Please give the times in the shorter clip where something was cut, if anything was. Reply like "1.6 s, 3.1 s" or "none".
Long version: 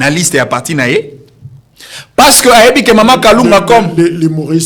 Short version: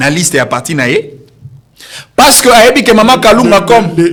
none